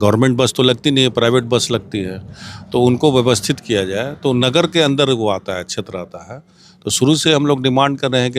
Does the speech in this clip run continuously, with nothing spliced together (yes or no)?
yes